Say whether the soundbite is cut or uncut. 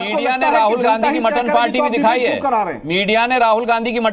uncut